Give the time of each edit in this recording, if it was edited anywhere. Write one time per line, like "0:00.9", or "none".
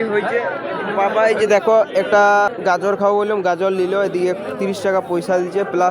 0:02.5